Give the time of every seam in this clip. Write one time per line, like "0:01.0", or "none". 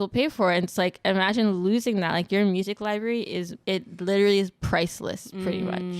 0:03.5